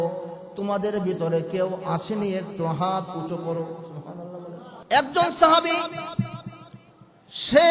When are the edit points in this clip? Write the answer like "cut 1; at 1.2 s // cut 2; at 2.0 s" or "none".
cut 1; at 4.7 s